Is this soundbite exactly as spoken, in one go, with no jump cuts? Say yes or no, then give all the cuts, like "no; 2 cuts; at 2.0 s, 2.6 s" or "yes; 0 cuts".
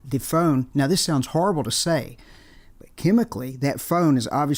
yes; 0 cuts